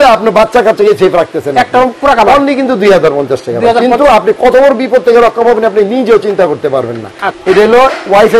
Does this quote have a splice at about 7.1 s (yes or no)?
no